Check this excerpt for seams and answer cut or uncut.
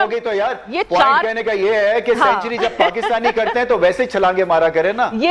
uncut